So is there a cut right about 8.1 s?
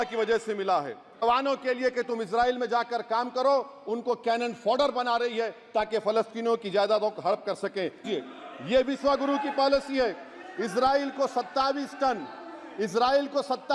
yes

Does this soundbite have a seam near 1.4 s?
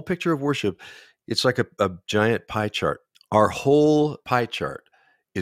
no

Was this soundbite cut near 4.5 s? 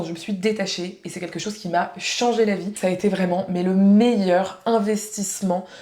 no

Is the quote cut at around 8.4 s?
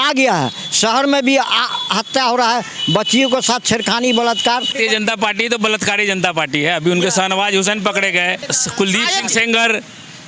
yes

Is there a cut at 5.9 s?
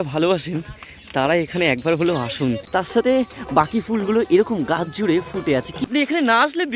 yes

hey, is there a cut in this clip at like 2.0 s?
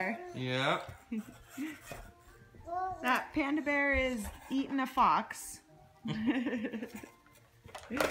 no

